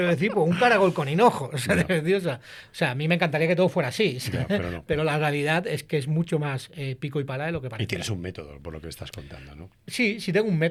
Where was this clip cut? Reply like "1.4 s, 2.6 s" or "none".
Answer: none